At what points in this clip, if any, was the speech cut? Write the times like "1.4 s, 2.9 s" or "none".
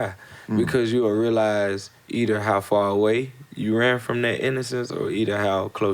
none